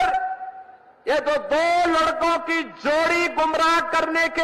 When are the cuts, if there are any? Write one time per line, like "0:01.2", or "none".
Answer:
none